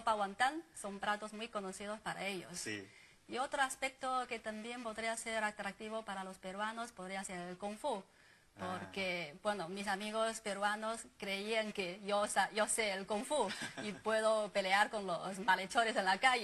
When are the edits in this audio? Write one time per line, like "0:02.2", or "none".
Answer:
0:09.7